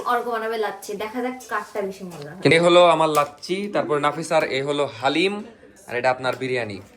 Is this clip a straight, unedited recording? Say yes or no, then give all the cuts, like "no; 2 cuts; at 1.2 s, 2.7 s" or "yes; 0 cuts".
no; 1 cut; at 2.5 s